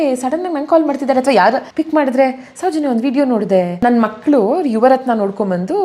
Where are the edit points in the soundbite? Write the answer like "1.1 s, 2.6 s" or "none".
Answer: 1.7 s, 3.8 s